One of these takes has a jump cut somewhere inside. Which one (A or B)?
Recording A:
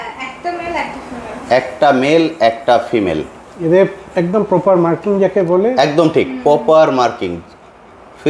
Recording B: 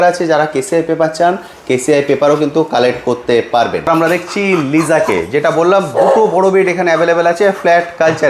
B